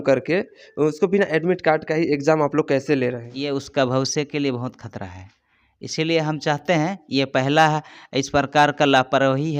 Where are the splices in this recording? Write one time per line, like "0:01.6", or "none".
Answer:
0:03.3